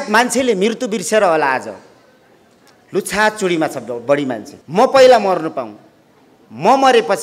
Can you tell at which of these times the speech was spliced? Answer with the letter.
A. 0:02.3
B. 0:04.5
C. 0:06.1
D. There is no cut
B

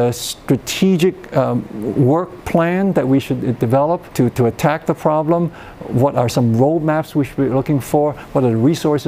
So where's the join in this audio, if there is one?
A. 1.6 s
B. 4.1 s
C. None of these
B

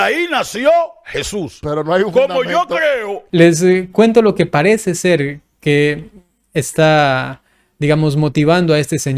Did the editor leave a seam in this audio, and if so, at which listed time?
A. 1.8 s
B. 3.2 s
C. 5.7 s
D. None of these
B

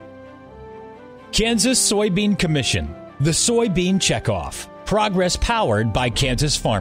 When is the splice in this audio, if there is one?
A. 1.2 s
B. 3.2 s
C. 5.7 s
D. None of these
A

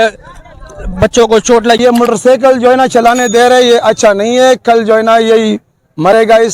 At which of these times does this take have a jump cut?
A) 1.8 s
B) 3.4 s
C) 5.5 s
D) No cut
A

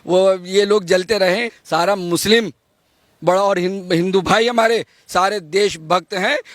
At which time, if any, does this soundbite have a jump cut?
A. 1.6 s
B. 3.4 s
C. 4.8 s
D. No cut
A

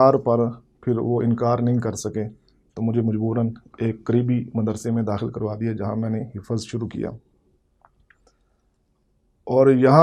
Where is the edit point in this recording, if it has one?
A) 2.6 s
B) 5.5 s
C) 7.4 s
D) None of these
D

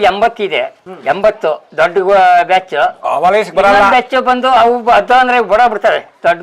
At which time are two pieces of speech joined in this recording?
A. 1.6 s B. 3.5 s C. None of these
A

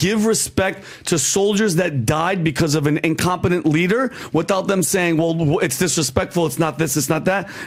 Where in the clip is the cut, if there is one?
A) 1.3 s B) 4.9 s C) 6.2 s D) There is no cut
D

